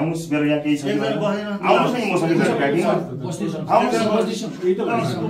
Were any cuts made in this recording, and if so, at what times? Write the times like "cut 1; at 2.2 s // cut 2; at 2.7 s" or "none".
none